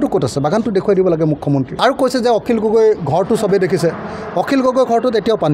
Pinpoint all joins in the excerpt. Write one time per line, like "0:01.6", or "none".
0:01.7